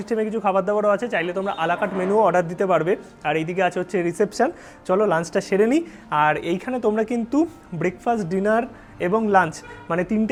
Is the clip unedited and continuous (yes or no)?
yes